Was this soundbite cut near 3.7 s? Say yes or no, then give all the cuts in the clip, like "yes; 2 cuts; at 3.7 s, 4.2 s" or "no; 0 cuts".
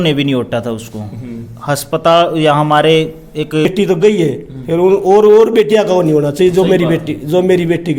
yes; 1 cut; at 3.7 s